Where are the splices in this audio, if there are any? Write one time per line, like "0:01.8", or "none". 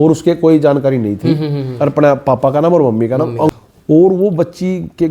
0:03.5